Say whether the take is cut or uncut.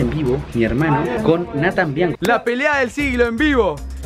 cut